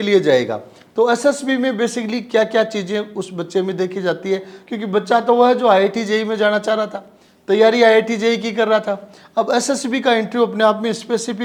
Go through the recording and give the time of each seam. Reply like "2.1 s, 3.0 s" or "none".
none